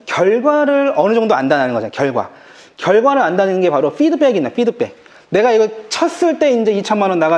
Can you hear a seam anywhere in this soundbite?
no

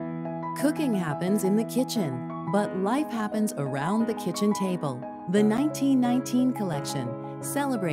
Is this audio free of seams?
yes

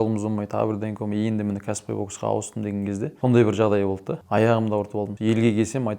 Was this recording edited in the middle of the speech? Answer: yes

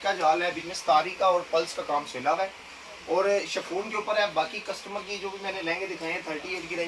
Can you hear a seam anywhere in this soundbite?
no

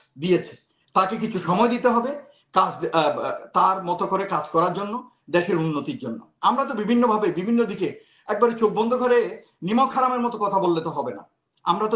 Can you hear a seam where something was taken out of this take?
no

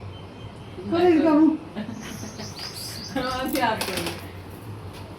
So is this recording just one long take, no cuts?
no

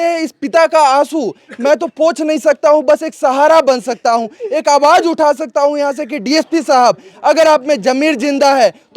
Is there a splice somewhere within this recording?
no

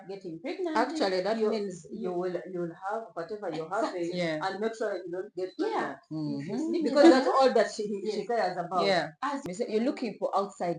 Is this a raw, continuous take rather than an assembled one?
no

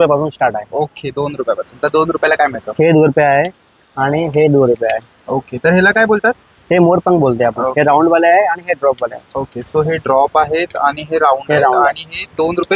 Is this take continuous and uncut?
yes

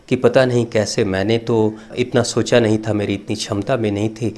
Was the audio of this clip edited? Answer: yes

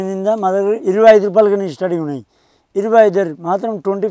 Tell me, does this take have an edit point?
no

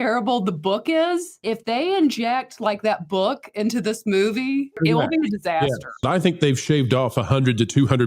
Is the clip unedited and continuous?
no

